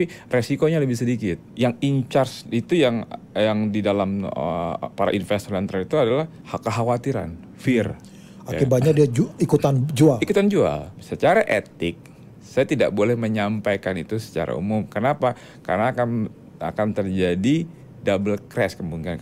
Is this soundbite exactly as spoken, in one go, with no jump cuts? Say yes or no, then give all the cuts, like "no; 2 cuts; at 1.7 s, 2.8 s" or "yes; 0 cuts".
no; 3 cuts; at 1.4 s, 6.4 s, 10.9 s